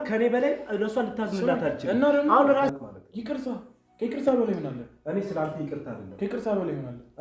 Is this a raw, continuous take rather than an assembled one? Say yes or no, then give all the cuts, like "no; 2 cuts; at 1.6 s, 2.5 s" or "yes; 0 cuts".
no; 1 cut; at 2.7 s